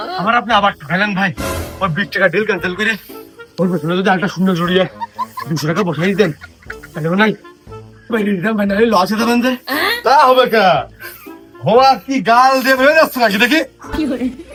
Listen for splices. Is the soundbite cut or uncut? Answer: uncut